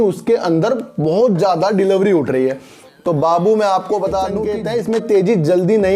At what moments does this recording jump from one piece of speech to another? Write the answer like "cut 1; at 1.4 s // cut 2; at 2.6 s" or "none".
cut 1; at 4.3 s